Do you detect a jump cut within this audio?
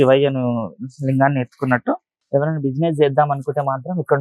yes; 1 cut; at 2.1 s

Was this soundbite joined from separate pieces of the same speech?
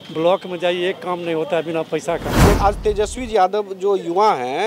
yes; 1 cut; at 2.4 s

